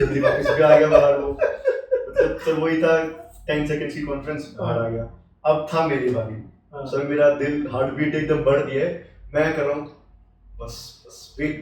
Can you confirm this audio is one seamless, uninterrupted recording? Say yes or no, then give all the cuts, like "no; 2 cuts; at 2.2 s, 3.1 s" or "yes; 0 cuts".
yes; 0 cuts